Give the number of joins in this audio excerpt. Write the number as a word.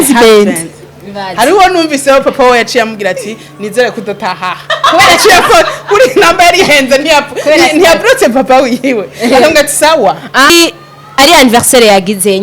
one